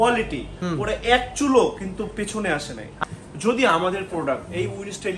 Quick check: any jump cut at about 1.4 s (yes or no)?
no